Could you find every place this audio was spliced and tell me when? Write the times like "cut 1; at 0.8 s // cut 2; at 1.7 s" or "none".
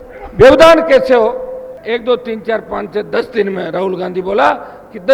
cut 1; at 1.7 s